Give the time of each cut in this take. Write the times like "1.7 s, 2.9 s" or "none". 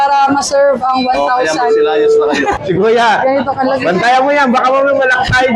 2.6 s